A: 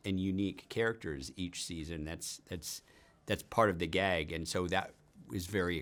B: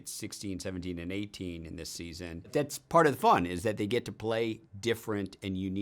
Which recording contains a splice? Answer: B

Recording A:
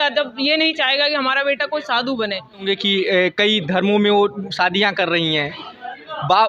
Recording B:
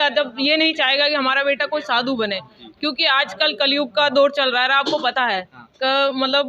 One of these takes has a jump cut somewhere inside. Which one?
A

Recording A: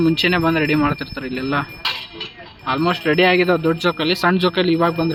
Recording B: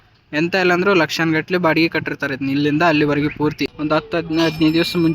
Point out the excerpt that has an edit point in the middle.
B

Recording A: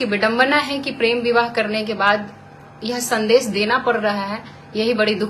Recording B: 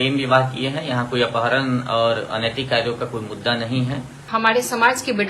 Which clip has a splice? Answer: B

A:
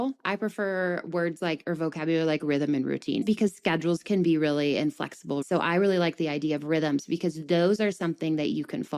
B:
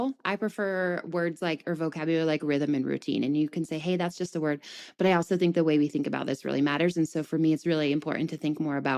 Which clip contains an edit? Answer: A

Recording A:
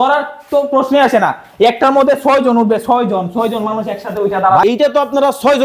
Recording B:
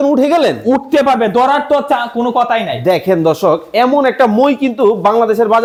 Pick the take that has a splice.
A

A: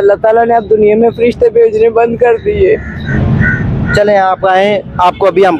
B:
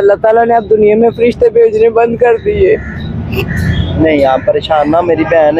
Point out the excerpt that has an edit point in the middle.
A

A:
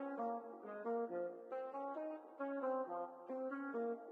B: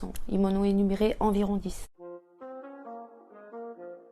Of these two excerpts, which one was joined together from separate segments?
B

